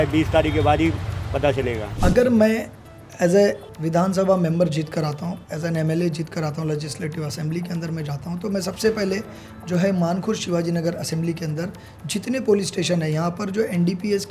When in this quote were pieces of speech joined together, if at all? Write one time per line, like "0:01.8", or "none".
0:01.9